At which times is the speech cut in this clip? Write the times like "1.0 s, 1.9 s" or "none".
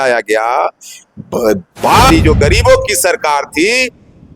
2.1 s

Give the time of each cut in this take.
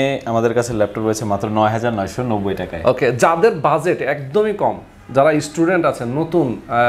none

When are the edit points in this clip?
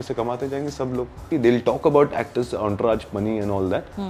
1.2 s

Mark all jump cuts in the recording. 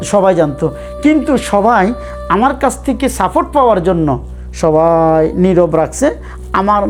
none

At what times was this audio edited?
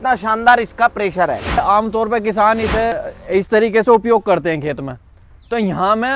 1.6 s, 2.9 s

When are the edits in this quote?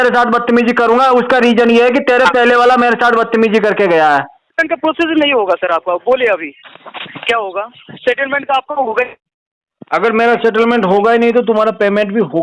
4.5 s

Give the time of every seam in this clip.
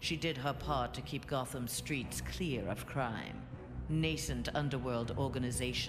5.0 s

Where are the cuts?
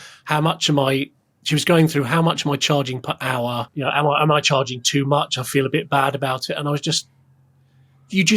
3.7 s

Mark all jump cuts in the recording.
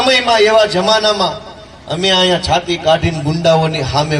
none

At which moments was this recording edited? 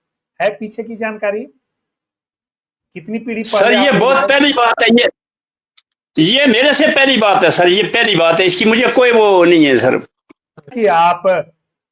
10.7 s

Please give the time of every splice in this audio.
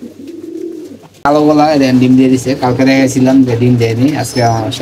1.3 s

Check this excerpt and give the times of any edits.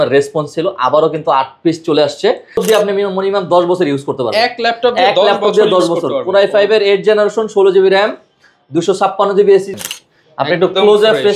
2.6 s, 9.8 s

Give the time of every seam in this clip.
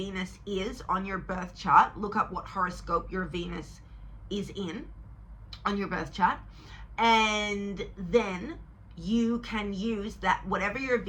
none

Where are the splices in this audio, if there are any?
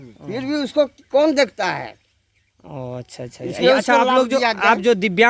none

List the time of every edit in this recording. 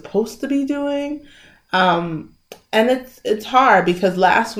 none

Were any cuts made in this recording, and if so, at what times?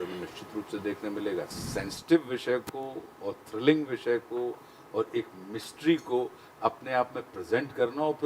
1.5 s

